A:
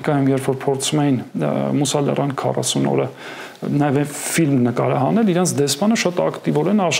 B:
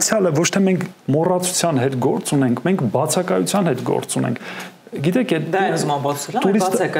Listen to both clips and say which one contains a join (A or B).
B